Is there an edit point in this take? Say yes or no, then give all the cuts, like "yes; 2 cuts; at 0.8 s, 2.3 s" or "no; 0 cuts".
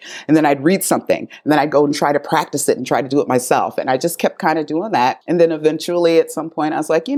yes; 1 cut; at 5.2 s